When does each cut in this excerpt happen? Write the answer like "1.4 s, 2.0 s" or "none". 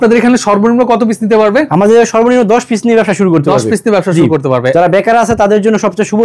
none